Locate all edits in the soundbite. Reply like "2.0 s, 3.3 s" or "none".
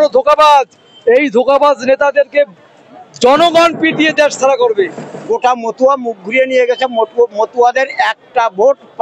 5.1 s